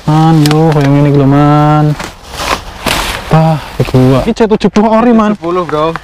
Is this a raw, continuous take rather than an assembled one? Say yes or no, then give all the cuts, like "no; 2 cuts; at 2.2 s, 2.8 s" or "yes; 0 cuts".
no; 1 cut; at 4.3 s